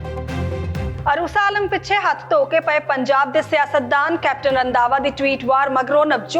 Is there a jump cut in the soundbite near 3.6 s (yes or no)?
no